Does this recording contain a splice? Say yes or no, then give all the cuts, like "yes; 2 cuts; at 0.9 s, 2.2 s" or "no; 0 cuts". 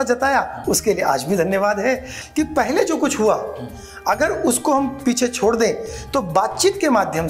yes; 1 cut; at 2.2 s